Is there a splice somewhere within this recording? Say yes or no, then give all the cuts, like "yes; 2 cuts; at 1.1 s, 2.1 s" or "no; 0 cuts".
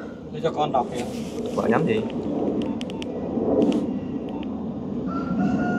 no; 0 cuts